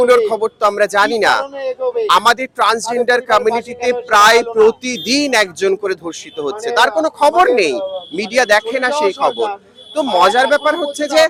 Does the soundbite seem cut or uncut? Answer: uncut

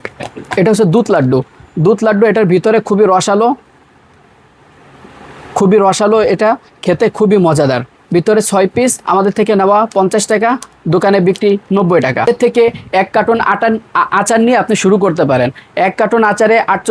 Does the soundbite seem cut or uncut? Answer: cut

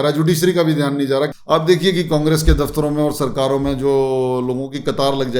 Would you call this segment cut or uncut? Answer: cut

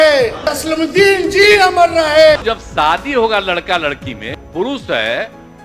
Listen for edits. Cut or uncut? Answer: cut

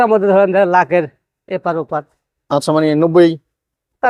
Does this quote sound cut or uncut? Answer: uncut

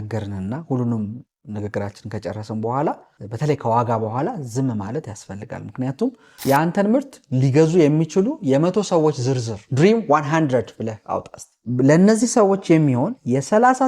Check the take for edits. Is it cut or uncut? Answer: cut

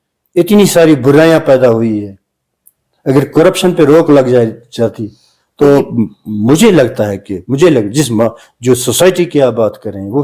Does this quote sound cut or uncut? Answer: uncut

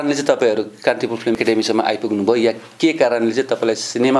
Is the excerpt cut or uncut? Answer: cut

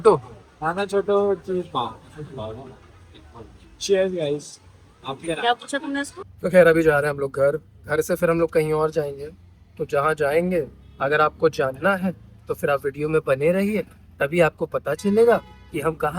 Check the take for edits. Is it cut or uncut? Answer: cut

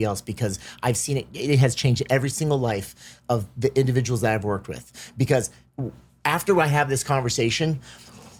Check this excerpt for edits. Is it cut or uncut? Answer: uncut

